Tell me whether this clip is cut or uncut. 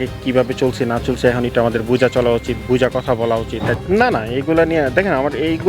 cut